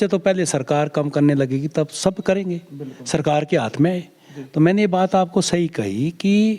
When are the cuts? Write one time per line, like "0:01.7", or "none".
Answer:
none